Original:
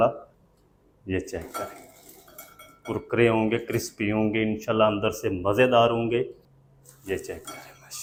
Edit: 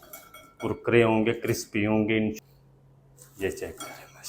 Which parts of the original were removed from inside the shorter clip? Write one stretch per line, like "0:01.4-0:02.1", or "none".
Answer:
0:04.7-0:06.1